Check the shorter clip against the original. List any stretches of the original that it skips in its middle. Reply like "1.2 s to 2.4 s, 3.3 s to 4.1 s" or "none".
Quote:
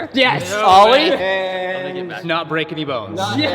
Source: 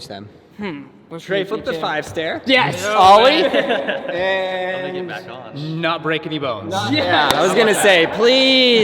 3.5 s to 4.2 s, 5.2 s to 5.8 s